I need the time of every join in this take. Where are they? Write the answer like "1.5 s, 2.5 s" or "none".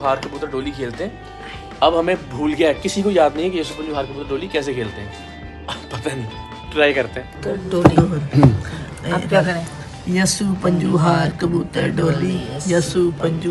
none